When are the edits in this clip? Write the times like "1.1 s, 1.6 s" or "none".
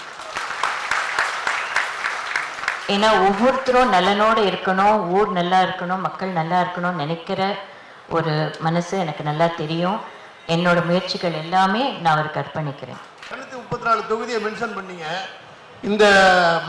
13.4 s